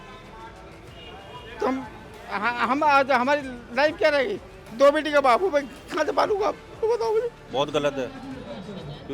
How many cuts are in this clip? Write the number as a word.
one